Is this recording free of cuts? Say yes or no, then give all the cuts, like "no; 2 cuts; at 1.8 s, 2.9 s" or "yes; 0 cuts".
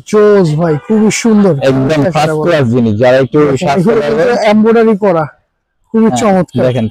yes; 0 cuts